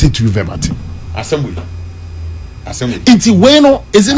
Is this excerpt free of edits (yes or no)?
yes